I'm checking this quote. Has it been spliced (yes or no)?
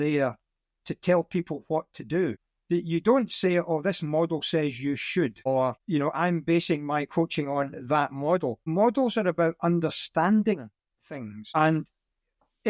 yes